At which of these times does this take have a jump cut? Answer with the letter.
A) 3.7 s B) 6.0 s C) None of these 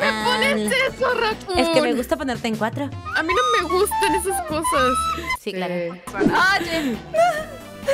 C